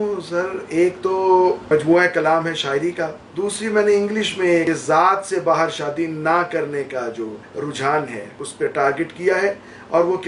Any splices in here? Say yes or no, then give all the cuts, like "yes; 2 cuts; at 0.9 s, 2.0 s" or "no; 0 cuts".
yes; 5 cuts; at 1.6 s, 3.2 s, 4.6 s, 7.4 s, 8.5 s